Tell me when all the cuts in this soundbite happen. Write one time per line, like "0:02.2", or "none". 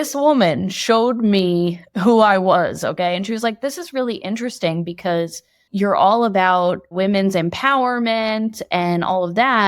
0:05.6
0:06.9

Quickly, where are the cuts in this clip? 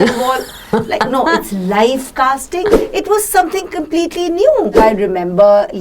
0:02.7
0:04.8

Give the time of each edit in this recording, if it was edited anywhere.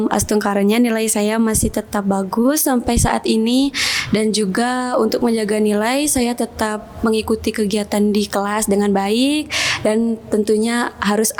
none

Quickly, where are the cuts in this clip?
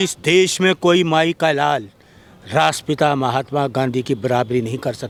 none

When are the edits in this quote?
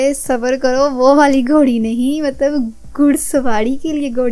none

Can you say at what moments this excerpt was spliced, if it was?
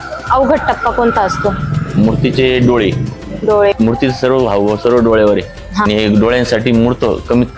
0:03.8
0:05.8

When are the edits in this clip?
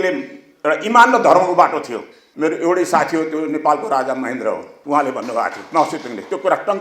0:02.2

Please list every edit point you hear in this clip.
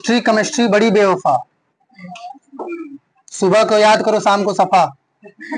none

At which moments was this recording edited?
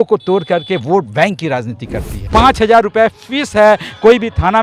0:02.2

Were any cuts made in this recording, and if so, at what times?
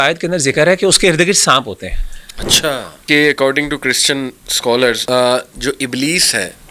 0:03.0
0:05.0

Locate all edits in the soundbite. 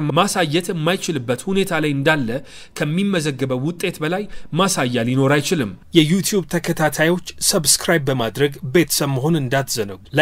0:05.8

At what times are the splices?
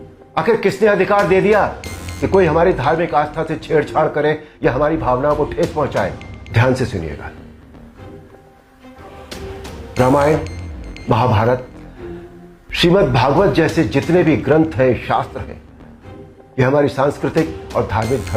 0:06.3
0:07.3
0:09.5

